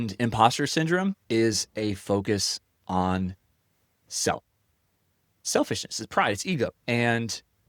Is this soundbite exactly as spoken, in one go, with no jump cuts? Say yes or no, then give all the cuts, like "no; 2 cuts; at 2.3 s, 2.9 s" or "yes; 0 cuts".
no; 2 cuts; at 1.2 s, 6.8 s